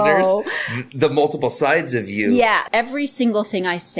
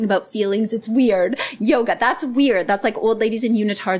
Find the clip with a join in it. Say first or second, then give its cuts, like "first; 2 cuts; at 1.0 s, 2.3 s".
first; 1 cut; at 2.6 s